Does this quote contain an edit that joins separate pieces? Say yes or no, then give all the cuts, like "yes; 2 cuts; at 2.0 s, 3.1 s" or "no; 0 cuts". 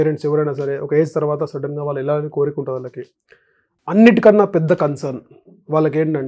no; 0 cuts